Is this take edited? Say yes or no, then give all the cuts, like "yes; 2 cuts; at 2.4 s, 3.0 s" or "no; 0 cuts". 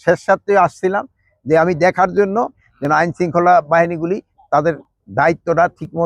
yes; 1 cut; at 2.7 s